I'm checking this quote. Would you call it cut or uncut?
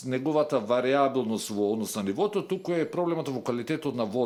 uncut